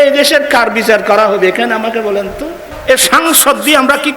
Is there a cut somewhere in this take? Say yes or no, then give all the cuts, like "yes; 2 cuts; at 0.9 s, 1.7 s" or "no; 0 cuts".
yes; 1 cut; at 2.8 s